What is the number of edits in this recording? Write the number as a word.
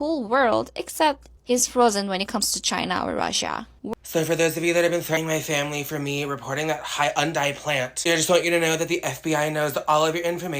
two